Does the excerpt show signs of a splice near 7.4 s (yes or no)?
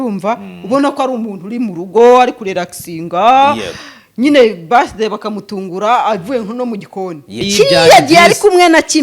yes